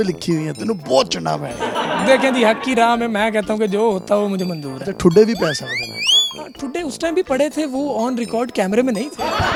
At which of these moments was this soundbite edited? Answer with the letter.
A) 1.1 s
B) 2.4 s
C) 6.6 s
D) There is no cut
D